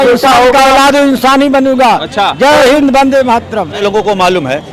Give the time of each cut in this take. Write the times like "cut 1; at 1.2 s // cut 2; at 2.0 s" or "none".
cut 1; at 3.8 s